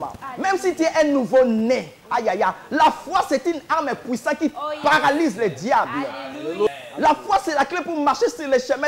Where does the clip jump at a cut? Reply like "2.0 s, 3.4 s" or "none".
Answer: 6.7 s